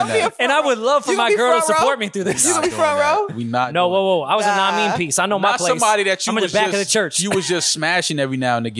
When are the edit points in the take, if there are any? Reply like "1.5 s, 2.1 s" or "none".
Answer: none